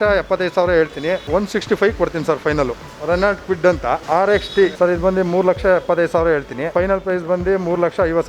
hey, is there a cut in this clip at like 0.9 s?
no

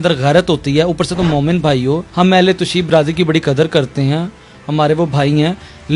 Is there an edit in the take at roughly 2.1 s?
yes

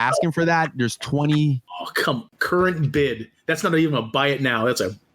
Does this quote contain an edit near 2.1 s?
yes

